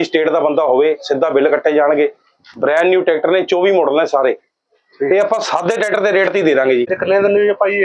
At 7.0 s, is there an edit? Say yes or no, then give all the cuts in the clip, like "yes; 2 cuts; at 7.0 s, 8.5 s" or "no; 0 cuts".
yes; 1 cut; at 7.0 s